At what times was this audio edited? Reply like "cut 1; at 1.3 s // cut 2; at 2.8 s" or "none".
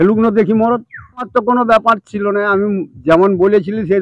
cut 1; at 1.3 s